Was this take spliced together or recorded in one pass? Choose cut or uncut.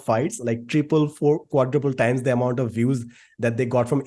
uncut